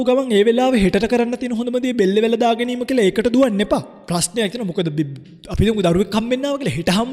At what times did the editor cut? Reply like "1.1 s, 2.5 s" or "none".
4.0 s